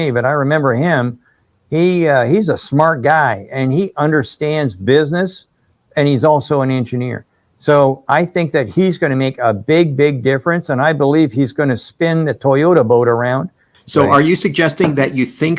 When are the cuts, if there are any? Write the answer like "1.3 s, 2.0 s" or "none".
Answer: 13.5 s